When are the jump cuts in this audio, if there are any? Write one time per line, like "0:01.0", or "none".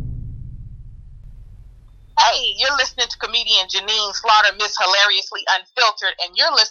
0:02.0

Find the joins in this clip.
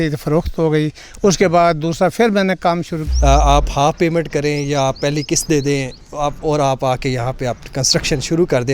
0:03.0

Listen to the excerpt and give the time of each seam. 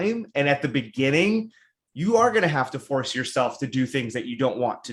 none

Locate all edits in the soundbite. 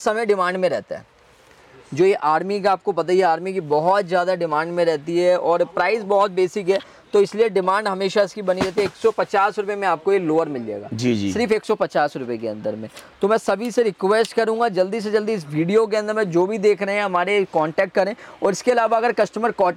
none

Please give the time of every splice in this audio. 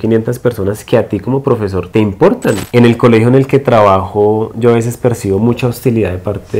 0:02.6

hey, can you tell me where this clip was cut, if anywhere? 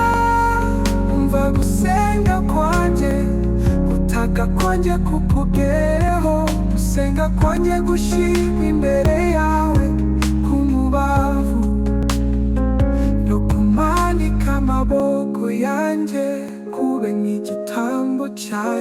none

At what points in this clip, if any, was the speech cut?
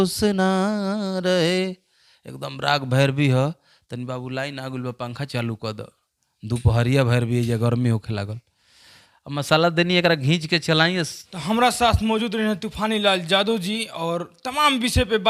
none

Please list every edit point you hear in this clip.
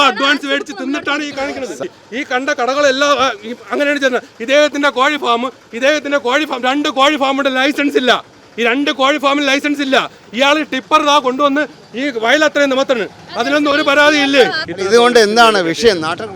0:01.8
0:14.7

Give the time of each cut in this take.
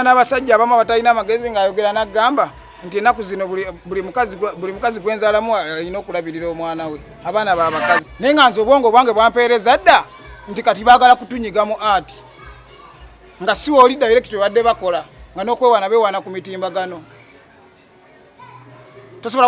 0:08.1

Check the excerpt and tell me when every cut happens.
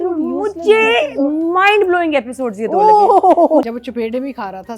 0:03.6

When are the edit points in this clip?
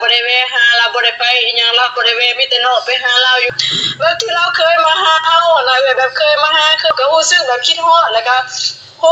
0:03.5
0:06.9

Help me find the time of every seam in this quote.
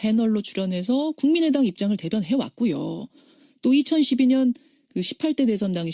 0:01.3

